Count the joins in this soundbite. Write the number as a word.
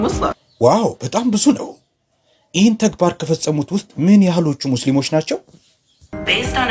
zero